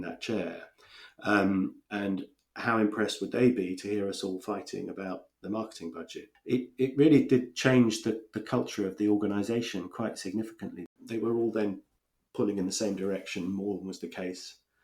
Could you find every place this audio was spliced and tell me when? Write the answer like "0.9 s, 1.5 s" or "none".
6.3 s, 11.0 s